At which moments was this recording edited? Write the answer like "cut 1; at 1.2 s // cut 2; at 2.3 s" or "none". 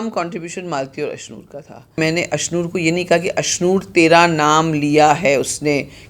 cut 1; at 2.0 s